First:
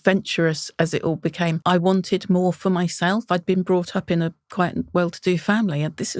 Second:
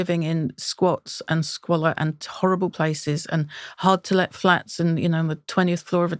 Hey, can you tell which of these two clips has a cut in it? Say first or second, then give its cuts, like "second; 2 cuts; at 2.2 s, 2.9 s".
first; 1 cut; at 1.6 s